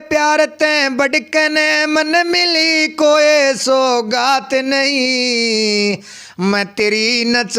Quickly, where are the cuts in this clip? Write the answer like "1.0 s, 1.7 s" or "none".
none